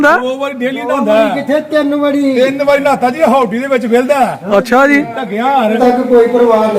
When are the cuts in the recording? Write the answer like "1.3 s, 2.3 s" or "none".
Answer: 5.8 s